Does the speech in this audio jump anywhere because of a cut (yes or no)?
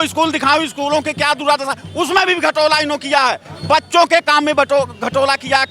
no